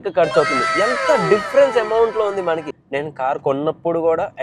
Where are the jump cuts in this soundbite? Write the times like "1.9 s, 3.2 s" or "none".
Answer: 2.8 s